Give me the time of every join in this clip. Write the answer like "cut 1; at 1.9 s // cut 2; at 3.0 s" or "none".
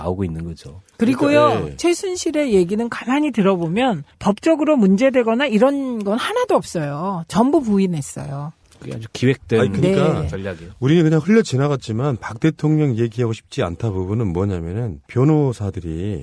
none